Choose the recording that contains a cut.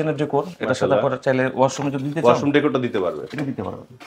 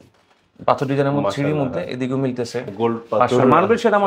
second; 1 cut; at 2.7 s

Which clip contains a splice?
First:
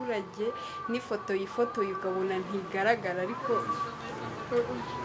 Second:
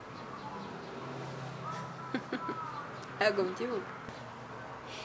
second; 1 cut; at 4.0 s

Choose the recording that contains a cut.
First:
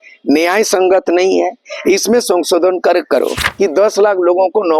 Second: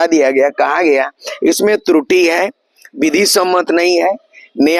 first; 1 cut; at 3.4 s

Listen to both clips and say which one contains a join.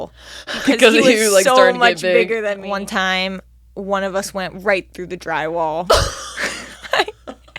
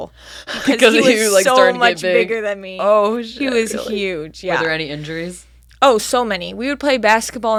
first; 1 cut; at 2.6 s

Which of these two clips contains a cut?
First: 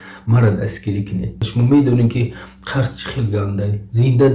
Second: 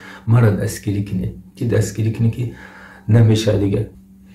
first; 1 cut; at 1.4 s

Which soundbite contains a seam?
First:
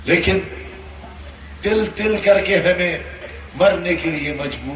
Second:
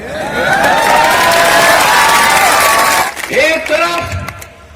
second; 1 cut; at 3.1 s

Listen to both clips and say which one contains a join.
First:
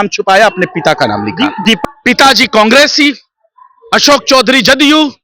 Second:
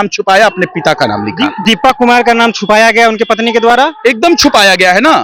first; 1 cut; at 1.8 s

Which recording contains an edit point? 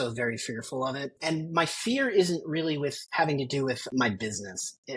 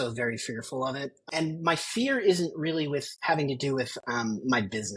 first; 2 cuts; at 1.1 s, 3.9 s

